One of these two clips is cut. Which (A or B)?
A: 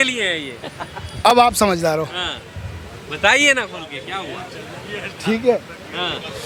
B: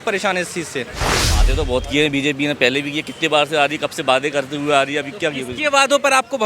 B